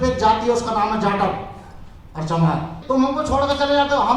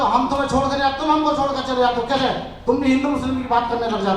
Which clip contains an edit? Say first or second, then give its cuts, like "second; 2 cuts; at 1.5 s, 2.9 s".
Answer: first; 1 cut; at 2.7 s